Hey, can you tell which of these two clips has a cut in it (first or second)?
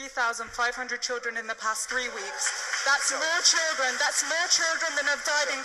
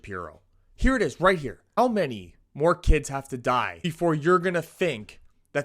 second